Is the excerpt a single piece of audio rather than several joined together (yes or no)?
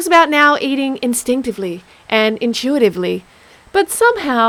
yes